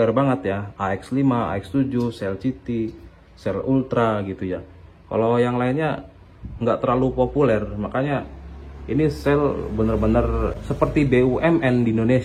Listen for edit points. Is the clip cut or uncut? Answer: cut